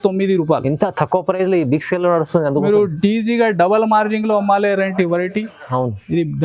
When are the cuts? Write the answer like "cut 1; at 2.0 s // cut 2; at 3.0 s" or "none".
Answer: none